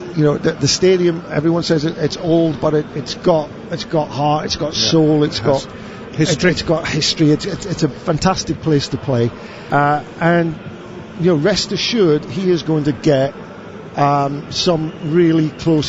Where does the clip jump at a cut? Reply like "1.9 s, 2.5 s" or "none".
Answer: 9.5 s